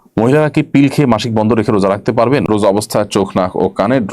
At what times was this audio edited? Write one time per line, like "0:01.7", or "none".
0:02.5